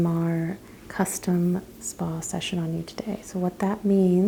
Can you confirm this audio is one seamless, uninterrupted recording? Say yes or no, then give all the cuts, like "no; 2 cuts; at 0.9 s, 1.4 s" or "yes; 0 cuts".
yes; 0 cuts